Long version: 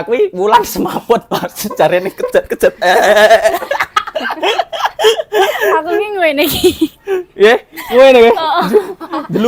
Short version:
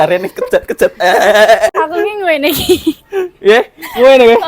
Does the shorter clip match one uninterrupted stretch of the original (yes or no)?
no